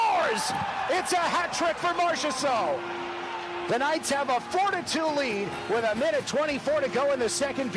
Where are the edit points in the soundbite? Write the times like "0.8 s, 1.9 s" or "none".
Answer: none